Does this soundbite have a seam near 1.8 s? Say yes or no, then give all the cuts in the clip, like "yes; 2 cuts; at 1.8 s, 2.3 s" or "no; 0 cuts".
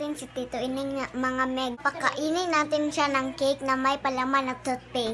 yes; 1 cut; at 1.8 s